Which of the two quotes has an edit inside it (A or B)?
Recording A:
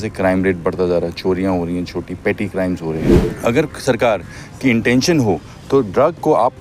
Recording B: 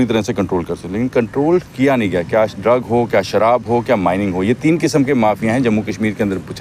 A